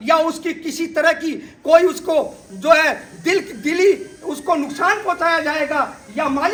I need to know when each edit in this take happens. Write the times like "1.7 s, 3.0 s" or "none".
none